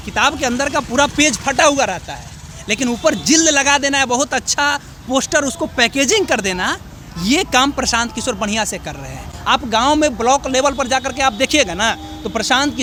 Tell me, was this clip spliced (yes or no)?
no